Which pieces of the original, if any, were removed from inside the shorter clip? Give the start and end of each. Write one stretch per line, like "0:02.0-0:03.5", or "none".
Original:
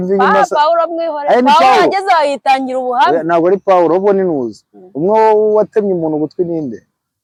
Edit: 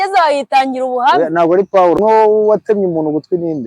0:03.9-0:05.0